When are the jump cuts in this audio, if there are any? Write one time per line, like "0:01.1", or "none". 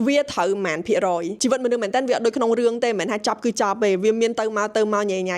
0:01.3